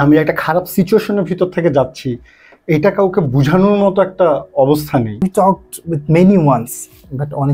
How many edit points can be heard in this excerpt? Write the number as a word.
one